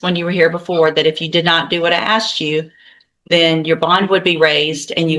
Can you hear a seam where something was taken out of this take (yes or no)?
no